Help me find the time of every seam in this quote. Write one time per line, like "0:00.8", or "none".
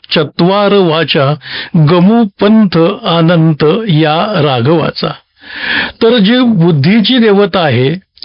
none